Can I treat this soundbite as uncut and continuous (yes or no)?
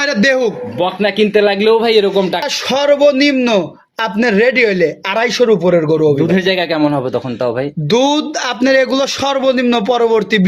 no